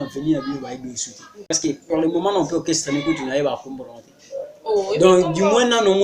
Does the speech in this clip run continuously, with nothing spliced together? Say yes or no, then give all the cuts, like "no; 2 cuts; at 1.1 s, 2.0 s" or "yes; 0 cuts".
no; 1 cut; at 1.5 s